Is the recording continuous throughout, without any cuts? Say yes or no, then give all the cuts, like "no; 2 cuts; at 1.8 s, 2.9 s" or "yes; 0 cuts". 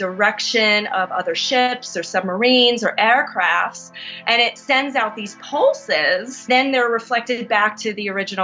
no; 1 cut; at 6.5 s